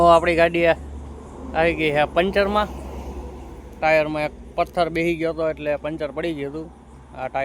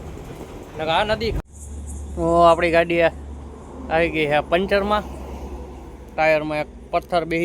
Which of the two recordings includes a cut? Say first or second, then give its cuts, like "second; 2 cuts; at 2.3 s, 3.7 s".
second; 1 cut; at 1.4 s